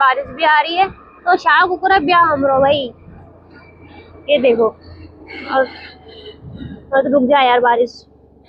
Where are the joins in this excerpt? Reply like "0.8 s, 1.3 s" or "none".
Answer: none